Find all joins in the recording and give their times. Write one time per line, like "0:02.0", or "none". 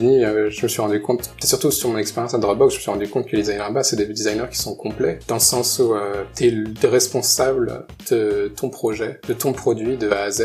0:01.4
0:09.2